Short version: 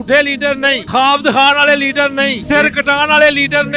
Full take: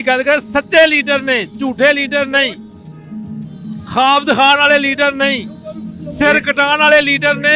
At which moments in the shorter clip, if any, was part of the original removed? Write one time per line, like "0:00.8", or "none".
0:00.8
0:02.4